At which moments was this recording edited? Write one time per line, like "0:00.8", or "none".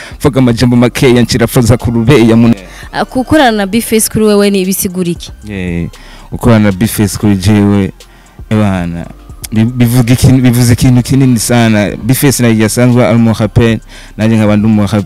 0:02.6